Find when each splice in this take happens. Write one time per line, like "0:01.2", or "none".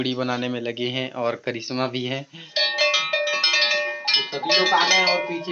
0:02.6